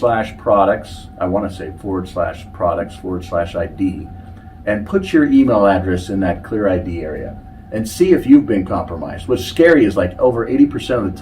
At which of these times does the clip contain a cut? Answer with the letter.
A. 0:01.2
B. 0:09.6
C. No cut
C